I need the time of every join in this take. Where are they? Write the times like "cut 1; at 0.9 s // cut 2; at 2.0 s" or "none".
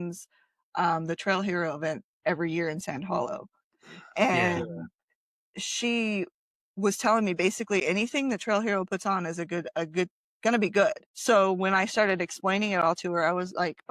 cut 1; at 11.1 s